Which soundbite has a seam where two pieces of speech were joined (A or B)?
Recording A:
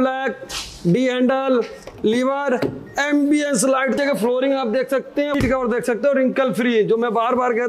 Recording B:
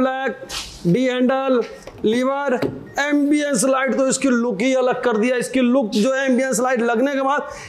A